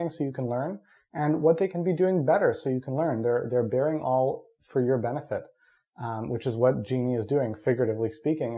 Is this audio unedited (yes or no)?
yes